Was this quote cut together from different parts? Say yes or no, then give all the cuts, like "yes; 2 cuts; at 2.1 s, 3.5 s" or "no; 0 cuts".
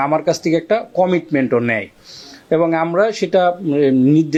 no; 0 cuts